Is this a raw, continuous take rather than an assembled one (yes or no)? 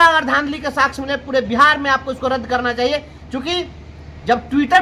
yes